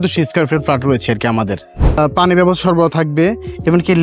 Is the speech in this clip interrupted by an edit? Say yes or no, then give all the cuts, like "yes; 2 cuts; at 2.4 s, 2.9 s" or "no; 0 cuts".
yes; 1 cut; at 2.0 s